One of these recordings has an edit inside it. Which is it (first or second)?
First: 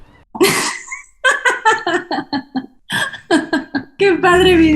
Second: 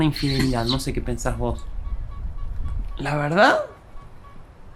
first